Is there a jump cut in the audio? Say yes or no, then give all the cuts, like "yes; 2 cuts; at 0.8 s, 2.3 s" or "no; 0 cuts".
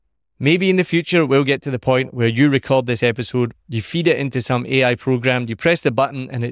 no; 0 cuts